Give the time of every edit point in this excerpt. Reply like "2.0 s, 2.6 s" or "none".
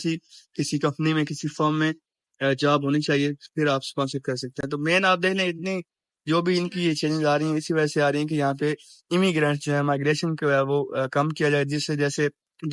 none